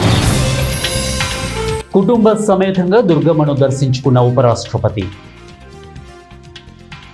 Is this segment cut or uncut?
cut